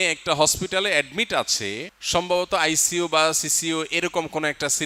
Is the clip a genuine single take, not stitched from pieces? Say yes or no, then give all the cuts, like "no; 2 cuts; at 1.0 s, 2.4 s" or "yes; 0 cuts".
yes; 0 cuts